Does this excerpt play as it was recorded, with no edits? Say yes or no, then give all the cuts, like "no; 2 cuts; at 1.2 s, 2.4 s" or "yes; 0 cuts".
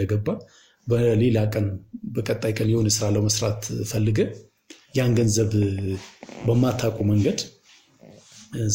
yes; 0 cuts